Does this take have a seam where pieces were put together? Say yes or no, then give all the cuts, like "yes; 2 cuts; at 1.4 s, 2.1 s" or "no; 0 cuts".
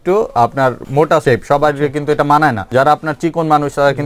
yes; 2 cuts; at 1.1 s, 2.6 s